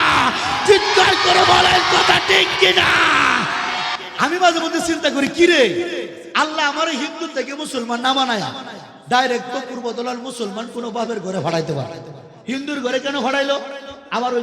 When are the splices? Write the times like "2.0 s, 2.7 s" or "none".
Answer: 4.0 s